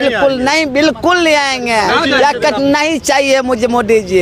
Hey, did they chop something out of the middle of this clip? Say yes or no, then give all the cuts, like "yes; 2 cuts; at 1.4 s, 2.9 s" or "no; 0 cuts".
no; 0 cuts